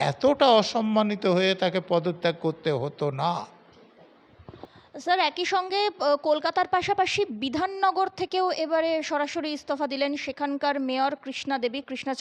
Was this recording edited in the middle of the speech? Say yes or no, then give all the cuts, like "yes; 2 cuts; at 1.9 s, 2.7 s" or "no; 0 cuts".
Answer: no; 0 cuts